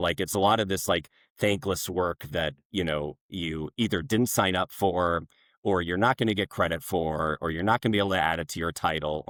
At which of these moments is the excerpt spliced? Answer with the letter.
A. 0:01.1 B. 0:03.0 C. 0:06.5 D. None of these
D